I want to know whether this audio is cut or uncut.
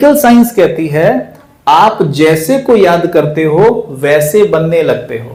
uncut